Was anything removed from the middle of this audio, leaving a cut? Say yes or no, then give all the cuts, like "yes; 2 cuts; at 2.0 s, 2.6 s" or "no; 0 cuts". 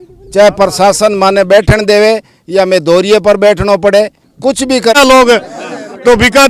yes; 1 cut; at 5.0 s